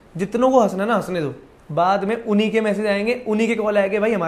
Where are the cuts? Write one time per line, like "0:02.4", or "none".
none